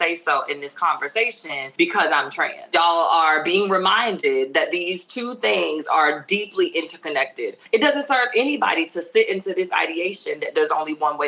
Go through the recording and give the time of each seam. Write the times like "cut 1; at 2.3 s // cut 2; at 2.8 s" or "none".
cut 1; at 1.6 s // cut 2; at 2.7 s // cut 3; at 7.6 s